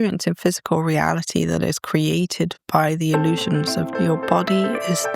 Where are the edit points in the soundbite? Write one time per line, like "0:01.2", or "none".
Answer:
0:02.6
0:03.9